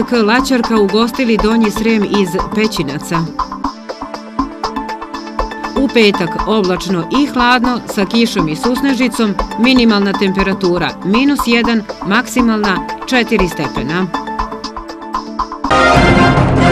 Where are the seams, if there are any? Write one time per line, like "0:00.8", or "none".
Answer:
0:15.6